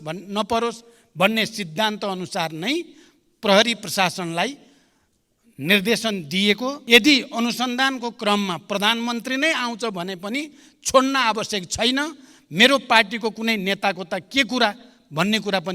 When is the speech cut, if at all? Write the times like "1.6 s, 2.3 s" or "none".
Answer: 6.8 s